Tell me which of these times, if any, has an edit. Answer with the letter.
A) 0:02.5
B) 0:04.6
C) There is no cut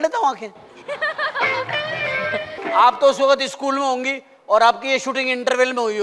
A